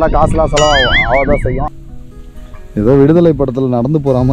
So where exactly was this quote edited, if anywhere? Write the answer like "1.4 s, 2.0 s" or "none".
1.7 s